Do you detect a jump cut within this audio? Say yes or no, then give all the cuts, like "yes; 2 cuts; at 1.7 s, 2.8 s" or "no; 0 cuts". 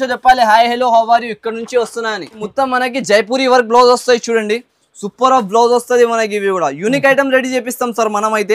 yes; 1 cut; at 2.4 s